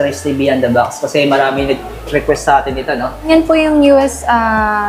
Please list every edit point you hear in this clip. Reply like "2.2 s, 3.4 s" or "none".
3.3 s